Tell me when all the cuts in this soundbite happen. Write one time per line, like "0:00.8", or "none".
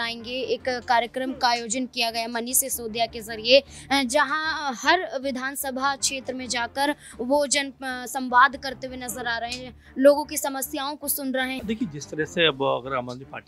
0:11.6